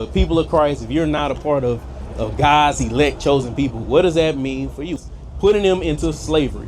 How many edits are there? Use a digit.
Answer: 1